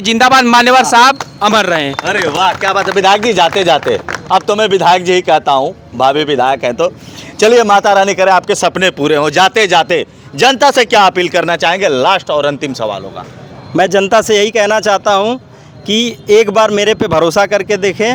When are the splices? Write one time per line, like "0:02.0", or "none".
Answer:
none